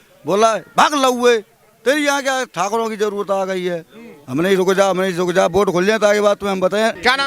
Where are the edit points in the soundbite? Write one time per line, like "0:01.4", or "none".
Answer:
none